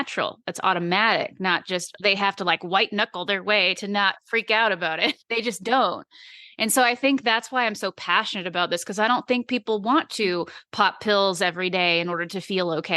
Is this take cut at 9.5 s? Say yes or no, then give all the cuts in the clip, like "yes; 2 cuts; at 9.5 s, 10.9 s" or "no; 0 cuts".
no; 1 cut; at 5.6 s